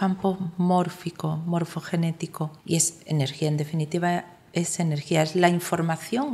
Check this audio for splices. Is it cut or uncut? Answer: cut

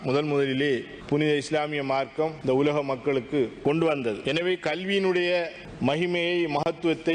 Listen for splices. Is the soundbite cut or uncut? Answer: cut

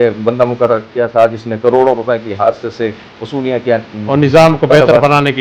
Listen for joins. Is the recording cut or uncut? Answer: uncut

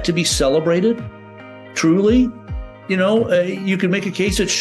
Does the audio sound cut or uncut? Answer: uncut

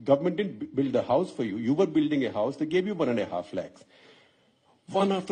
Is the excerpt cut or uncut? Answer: uncut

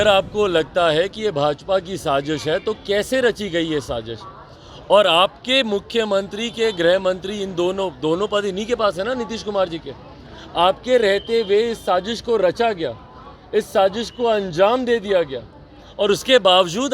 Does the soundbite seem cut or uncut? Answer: uncut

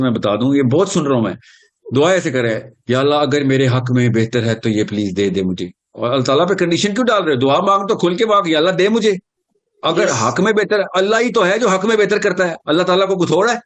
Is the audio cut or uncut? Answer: uncut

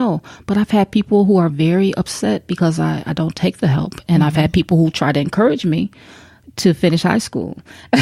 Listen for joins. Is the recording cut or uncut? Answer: uncut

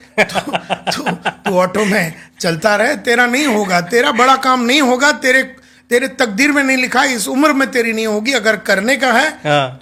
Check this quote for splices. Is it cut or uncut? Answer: uncut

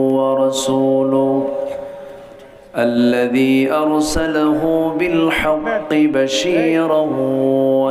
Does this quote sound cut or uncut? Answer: uncut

